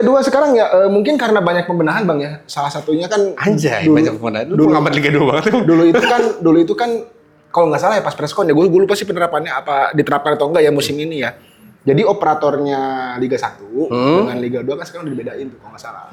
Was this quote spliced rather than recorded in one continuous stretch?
no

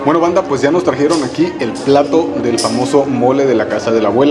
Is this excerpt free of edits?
yes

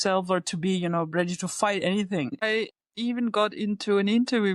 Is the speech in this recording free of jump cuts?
no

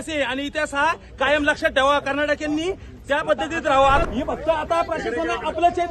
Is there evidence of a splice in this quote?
yes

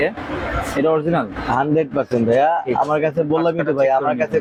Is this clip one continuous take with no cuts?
yes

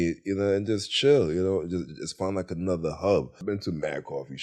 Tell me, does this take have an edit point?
yes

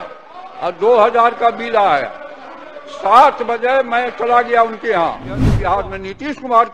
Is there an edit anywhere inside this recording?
yes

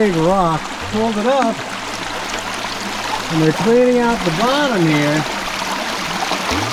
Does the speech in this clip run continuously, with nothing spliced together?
yes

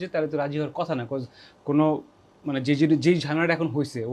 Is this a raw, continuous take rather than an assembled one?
yes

